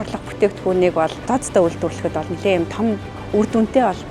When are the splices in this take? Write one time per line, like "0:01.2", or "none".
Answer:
0:01.2